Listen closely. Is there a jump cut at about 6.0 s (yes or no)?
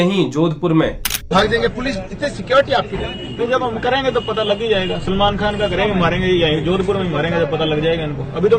no